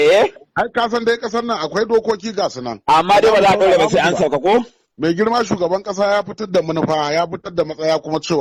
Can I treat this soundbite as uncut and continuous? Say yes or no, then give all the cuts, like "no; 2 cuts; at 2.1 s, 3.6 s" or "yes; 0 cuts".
yes; 0 cuts